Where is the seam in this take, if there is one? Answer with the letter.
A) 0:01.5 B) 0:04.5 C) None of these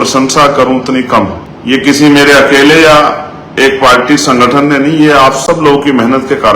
A